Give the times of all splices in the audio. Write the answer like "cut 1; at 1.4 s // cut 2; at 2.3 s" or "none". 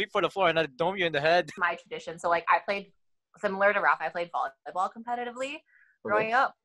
cut 1; at 1.5 s

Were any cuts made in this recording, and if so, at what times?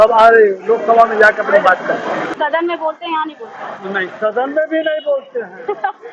cut 1; at 2.3 s

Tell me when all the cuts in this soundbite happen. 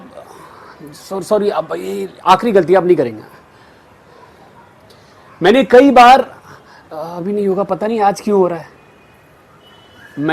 none

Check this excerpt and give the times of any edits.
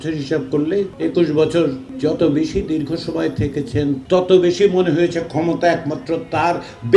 cut 1; at 0.9 s // cut 2; at 1.9 s // cut 3; at 4.0 s

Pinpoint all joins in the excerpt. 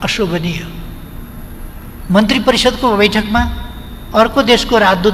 none

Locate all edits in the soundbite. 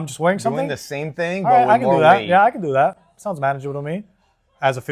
none

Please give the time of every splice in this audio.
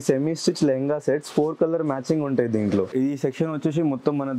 cut 1; at 2.9 s

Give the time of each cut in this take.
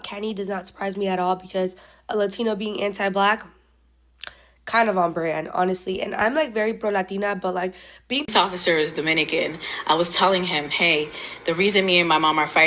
cut 1; at 8.3 s

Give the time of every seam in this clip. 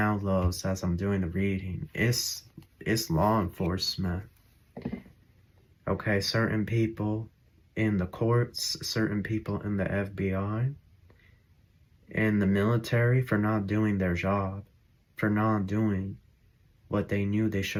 none

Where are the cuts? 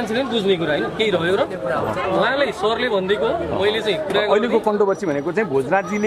none

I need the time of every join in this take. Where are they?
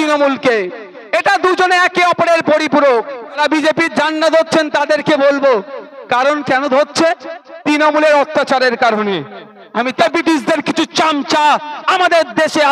cut 1; at 3.4 s // cut 2; at 9.9 s

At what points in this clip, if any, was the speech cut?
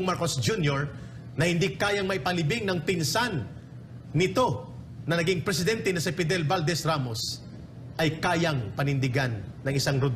none

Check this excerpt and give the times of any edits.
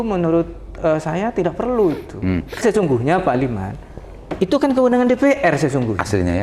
cut 1; at 2.6 s

